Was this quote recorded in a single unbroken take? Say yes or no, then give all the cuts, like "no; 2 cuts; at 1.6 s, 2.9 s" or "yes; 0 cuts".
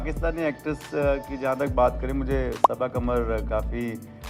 yes; 0 cuts